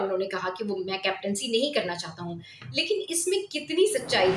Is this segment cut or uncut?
uncut